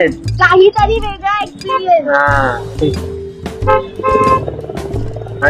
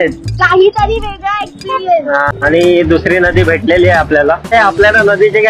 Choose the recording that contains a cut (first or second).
second